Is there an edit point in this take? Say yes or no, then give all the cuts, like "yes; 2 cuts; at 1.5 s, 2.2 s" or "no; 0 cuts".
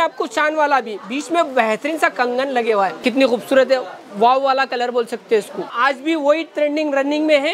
yes; 2 cuts; at 3.0 s, 5.7 s